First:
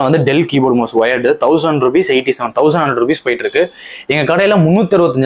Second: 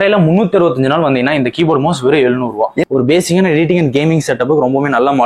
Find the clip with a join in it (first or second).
second